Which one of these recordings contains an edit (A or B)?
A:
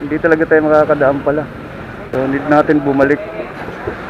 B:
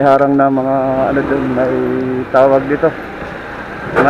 A